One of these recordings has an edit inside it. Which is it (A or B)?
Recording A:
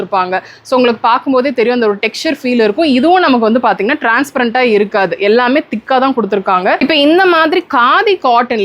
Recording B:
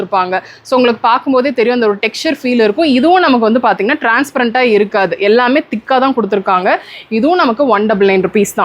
A